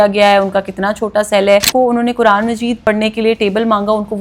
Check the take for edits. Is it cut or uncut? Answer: cut